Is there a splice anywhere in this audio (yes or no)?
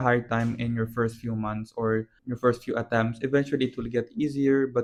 no